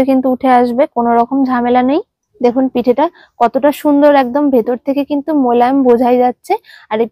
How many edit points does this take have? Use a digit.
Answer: 1